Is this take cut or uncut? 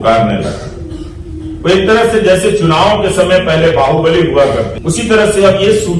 cut